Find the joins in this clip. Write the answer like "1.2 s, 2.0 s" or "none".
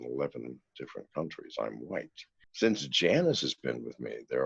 2.4 s